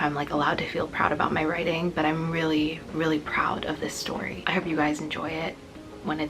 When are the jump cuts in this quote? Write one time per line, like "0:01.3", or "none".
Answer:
none

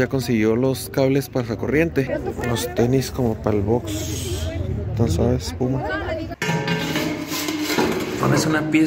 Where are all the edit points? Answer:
0:02.1
0:06.3

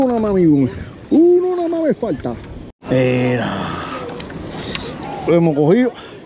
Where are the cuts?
0:02.7

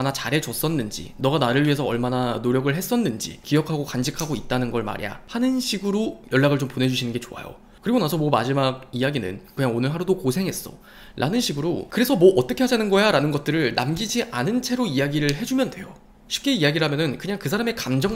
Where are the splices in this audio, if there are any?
0:03.4
0:05.1
0:09.6

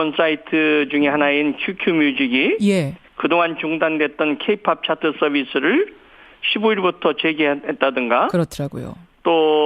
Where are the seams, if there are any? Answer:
0:03.6

